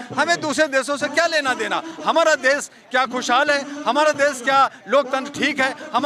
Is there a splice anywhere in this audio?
no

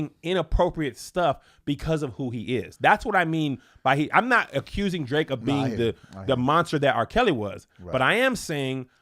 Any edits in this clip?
no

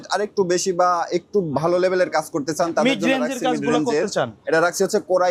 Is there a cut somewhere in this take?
no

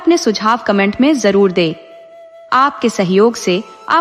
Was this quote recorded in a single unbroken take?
yes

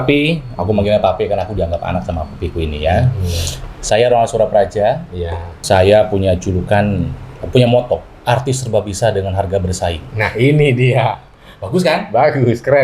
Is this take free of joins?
yes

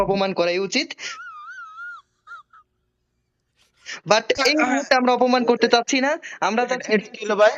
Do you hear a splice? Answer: no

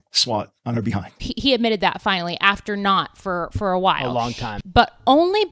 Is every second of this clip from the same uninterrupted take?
no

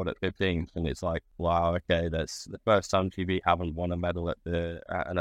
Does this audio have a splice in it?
yes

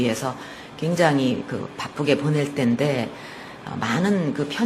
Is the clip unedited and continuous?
yes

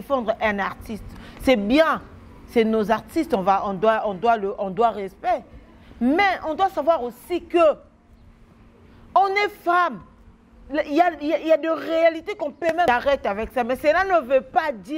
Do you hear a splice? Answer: yes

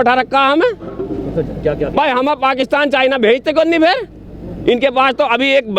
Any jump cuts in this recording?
no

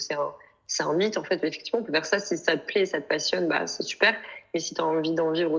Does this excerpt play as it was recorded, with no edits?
yes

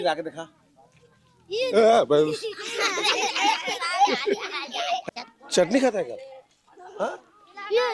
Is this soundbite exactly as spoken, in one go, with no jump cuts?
no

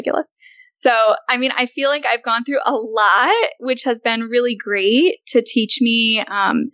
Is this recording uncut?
yes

